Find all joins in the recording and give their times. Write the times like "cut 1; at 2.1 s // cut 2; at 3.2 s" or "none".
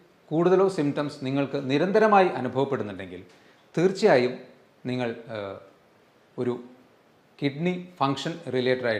none